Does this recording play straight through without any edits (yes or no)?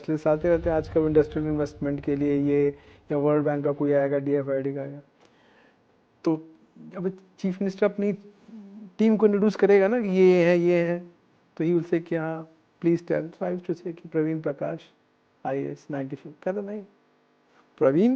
yes